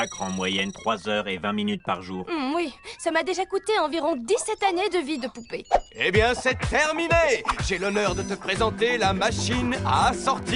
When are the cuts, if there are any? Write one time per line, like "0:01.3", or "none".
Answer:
0:07.1